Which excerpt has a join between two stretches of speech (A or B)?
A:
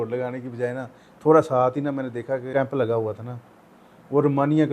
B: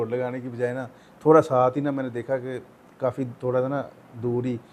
A